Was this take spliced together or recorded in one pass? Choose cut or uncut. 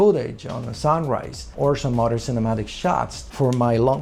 uncut